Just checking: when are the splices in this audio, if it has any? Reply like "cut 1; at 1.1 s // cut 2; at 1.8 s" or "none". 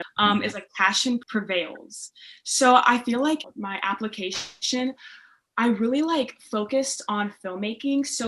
cut 1; at 1.2 s